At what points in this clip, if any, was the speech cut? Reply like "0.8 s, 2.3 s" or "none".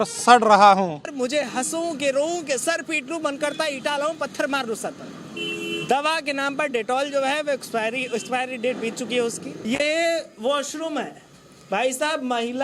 1.1 s, 9.5 s